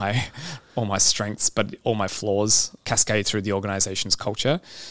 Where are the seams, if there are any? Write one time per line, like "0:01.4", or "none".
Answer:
0:02.7